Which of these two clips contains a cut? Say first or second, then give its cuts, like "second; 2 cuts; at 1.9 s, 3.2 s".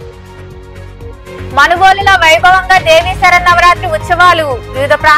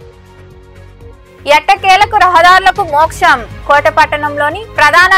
first; 1 cut; at 1.2 s